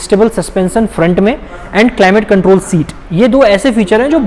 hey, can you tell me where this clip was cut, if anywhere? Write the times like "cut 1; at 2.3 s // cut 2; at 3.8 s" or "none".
none